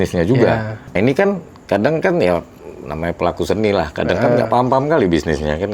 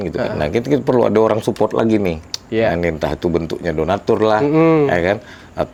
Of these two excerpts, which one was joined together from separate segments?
first; 1 cut; at 0.9 s

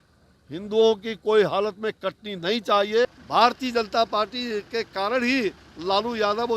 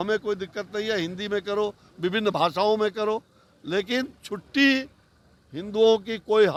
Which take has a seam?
first; 1 cut; at 3.1 s

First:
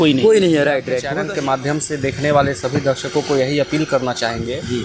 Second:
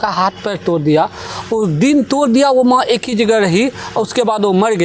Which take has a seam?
first; 1 cut; at 1.0 s

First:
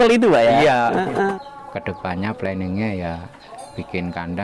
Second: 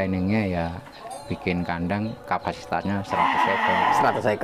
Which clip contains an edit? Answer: first; 1 cut; at 1.4 s

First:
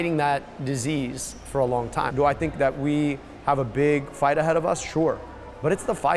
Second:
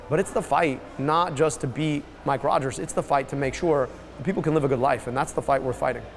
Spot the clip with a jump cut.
first; 1 cut; at 2.1 s

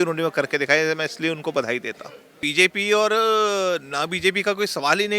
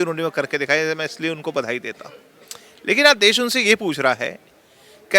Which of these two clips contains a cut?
first; 1 cut; at 2.4 s

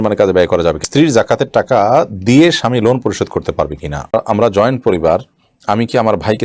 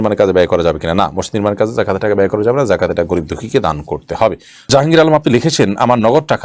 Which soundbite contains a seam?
first; 2 cuts; at 0.8 s, 4.1 s

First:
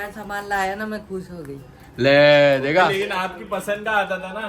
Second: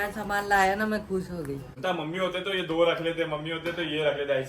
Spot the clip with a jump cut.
second; 1 cut; at 1.7 s

